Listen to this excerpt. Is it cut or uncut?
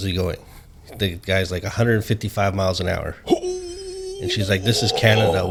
uncut